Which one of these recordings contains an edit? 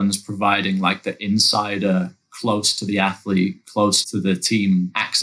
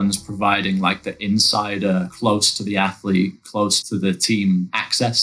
second; 1 cut; at 2.1 s

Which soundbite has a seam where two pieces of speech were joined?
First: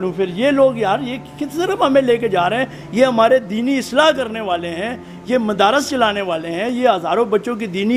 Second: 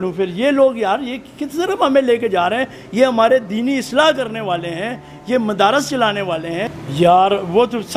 second; 1 cut; at 6.7 s

